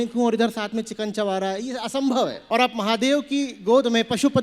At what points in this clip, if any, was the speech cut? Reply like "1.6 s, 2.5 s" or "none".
2.4 s